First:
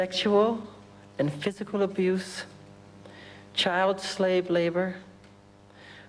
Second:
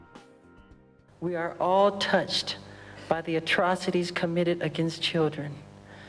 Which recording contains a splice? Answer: first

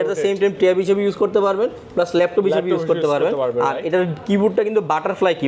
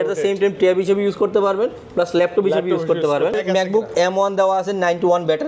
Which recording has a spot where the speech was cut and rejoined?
second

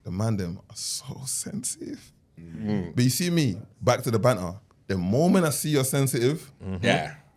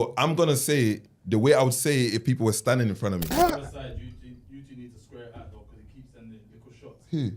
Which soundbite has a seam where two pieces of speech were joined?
second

